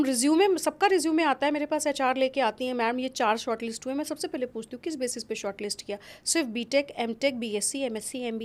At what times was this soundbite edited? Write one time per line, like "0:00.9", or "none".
none